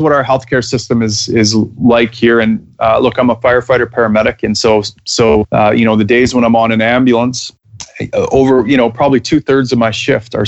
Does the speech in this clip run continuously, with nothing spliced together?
yes; 0 cuts

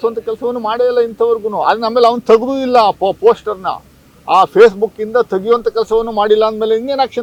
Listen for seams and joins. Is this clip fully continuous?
yes; 0 cuts

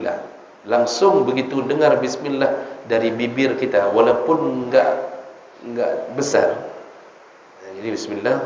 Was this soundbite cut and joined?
no; 0 cuts

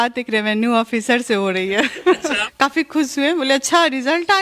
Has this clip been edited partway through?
yes; 1 cut; at 2.4 s

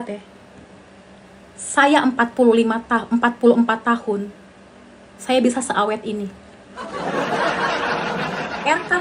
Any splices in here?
no; 0 cuts

